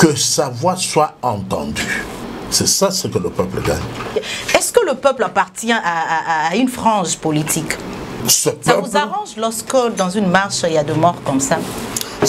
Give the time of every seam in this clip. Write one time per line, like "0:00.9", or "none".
0:02.2
0:04.1
0:08.2